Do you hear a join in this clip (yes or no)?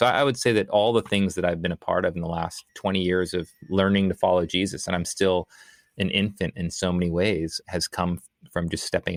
no